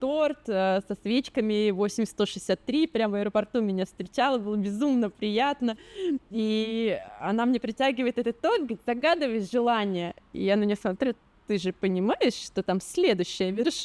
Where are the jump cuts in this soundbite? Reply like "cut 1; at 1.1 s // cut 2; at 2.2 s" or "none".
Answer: none